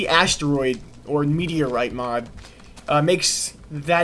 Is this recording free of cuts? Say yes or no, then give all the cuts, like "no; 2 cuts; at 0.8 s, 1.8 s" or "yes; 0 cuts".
yes; 0 cuts